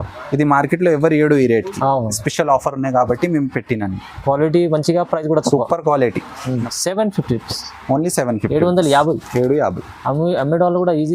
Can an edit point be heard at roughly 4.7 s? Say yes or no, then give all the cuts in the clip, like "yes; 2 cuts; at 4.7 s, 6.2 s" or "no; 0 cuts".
no; 1 cut; at 6.6 s